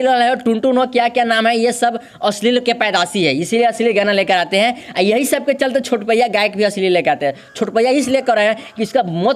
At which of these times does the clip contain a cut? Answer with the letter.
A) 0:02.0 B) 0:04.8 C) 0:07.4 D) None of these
D